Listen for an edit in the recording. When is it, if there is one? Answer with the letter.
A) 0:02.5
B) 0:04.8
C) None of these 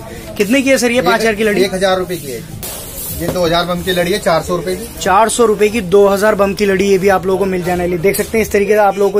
A